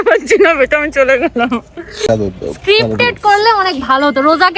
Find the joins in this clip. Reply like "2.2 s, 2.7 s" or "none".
2.1 s